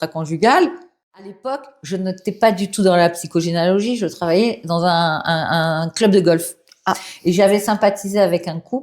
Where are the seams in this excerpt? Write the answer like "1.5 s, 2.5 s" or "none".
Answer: 1.3 s